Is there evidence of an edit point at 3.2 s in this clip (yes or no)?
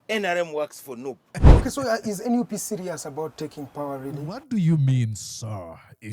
no